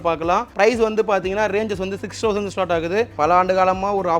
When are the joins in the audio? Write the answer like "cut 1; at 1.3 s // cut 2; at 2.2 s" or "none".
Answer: cut 1; at 3.1 s

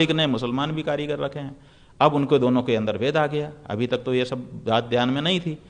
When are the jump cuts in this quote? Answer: none

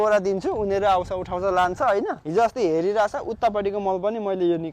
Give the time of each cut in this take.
cut 1; at 2.2 s

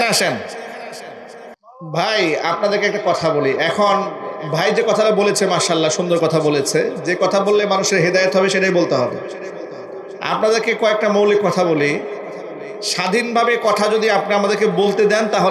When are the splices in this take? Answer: cut 1; at 1.6 s

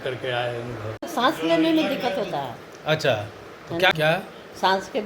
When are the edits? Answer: cut 1; at 0.9 s // cut 2; at 3.9 s

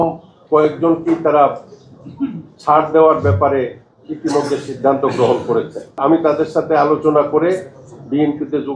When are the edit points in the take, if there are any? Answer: cut 1; at 6.0 s

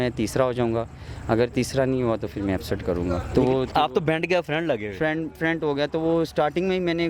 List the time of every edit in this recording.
none

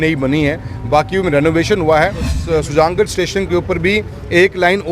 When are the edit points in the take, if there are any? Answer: cut 1; at 2.3 s

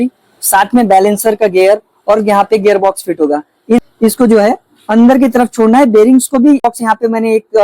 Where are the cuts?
cut 1; at 3.8 s // cut 2; at 6.6 s

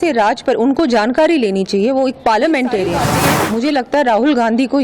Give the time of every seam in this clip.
cut 1; at 3.4 s

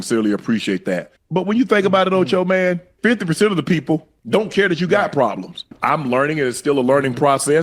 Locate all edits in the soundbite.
cut 1; at 1.2 s // cut 2; at 2.9 s // cut 3; at 4.1 s // cut 4; at 5.7 s

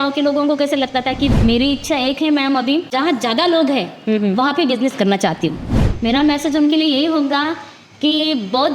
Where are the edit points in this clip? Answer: cut 1; at 1.3 s // cut 2; at 2.9 s // cut 3; at 5.7 s

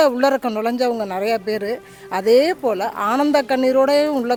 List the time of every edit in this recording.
none

